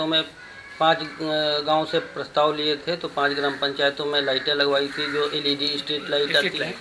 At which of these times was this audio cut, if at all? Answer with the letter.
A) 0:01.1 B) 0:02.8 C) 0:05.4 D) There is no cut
D